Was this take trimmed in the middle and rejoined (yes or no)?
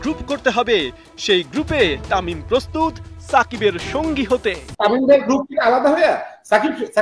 no